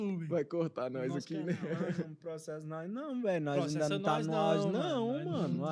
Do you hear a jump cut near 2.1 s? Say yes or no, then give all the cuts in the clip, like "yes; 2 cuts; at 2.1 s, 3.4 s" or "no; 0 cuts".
yes; 1 cut; at 2.1 s